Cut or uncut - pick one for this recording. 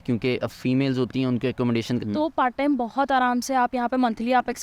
cut